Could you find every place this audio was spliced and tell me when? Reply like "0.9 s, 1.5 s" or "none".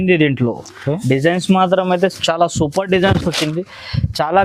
none